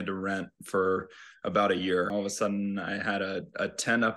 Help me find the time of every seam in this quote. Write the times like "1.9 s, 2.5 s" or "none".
2.1 s